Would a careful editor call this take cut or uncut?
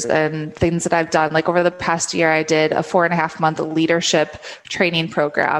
uncut